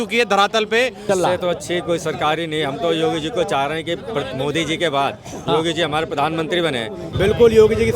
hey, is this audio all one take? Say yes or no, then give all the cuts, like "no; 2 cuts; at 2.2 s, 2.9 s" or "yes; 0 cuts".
no; 2 cuts; at 1.0 s, 7.0 s